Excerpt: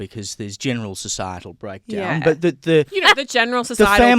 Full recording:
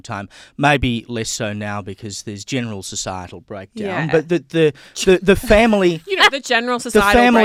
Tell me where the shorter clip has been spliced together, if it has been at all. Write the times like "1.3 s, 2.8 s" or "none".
2.9 s